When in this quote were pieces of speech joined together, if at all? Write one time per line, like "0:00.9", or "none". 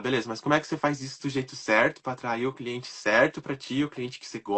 none